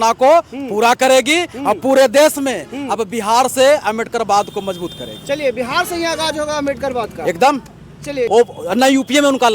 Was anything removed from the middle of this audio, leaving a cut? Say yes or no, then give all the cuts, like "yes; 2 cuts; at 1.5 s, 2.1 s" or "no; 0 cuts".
yes; 1 cut; at 8.3 s